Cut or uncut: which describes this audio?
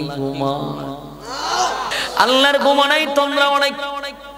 cut